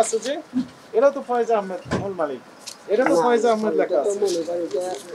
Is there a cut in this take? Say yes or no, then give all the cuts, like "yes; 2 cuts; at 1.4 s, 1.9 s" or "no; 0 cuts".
no; 0 cuts